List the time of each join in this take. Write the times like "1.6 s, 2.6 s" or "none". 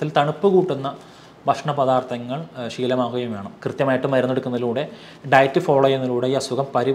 3.5 s